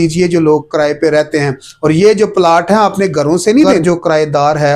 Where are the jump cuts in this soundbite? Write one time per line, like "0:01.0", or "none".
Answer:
0:03.8